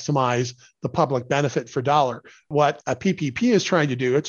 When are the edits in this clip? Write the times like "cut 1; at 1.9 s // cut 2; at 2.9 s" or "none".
cut 1; at 2.5 s